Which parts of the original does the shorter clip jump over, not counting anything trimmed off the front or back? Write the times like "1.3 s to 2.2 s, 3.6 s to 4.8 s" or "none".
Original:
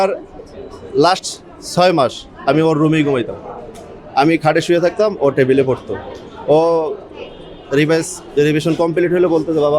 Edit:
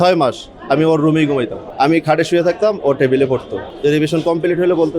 3.4 s to 4.0 s, 6.0 s to 8.2 s

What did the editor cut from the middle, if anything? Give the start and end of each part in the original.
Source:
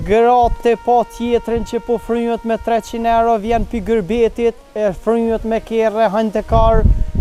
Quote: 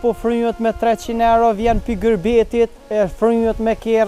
none

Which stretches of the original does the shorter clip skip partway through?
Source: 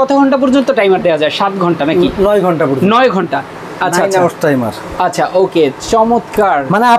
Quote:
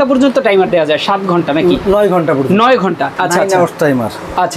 3.4 s to 3.7 s

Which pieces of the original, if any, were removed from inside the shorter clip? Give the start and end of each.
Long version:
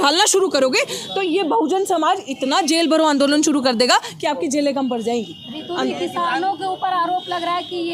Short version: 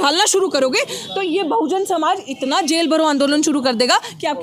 none

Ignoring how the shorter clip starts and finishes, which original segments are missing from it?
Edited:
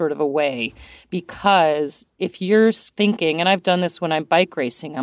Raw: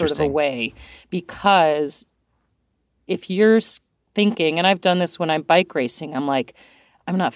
2.0 s to 2.9 s, 3.7 s to 4.0 s

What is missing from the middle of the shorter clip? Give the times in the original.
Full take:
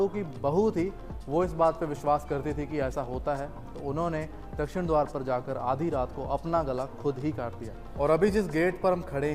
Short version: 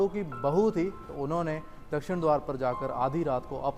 1.1 s to 3.7 s

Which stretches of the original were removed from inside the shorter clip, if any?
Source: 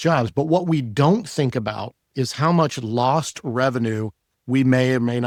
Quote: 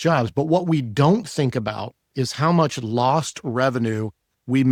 none

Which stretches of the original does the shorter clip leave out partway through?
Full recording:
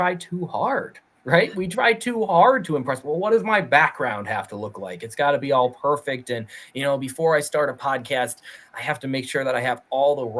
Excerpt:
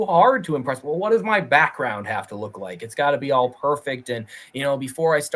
none

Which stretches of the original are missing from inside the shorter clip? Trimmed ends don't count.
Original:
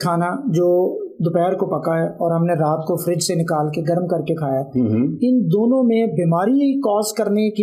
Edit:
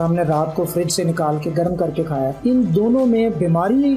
4.7 s to 5.2 s

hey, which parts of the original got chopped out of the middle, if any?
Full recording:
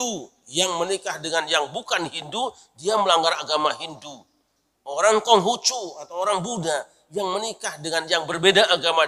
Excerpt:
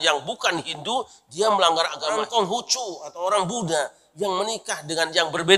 3.5 s to 4.9 s

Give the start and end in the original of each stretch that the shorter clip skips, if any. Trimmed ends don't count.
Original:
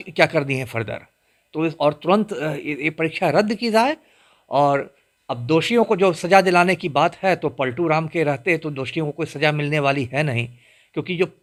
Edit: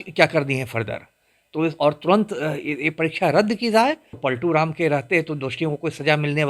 4.2 s to 7.5 s

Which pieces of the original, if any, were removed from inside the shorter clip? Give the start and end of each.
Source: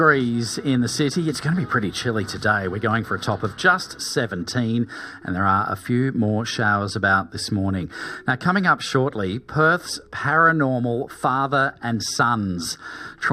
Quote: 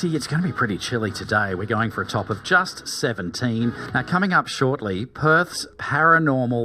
5.0 s to 8.2 s

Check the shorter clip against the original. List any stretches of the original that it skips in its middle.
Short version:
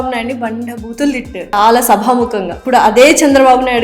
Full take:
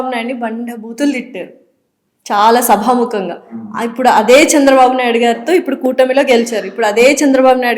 1.5 s to 2.3 s, 3.4 s to 3.9 s

